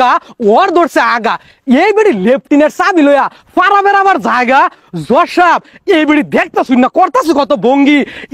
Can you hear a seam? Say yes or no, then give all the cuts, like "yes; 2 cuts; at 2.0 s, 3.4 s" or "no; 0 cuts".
no; 0 cuts